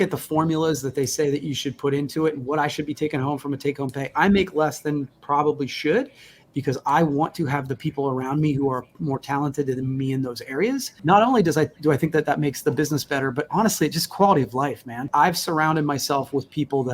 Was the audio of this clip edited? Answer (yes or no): yes